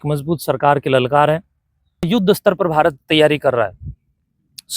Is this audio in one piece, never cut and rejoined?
no; 1 cut; at 2.0 s

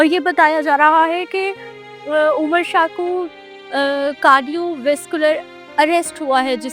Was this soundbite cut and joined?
no; 0 cuts

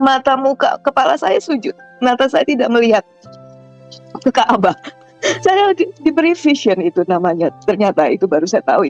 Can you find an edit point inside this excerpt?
yes; 1 cut; at 5.4 s

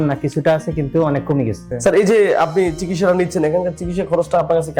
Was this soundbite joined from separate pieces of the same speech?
yes; 1 cut; at 1.6 s

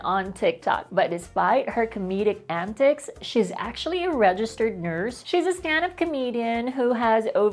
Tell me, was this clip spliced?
yes; 2 cuts; at 0.8 s, 5.2 s

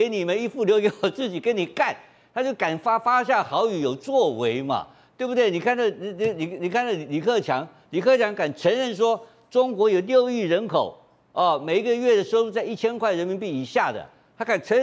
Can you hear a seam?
no; 0 cuts

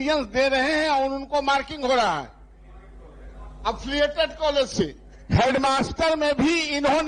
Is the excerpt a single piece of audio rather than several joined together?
yes; 0 cuts

